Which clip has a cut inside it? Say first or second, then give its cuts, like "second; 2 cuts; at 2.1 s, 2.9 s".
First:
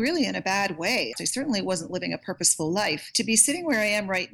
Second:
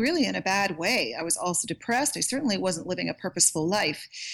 first; 2 cuts; at 1.2 s, 3.1 s